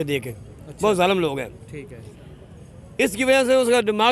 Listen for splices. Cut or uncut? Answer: uncut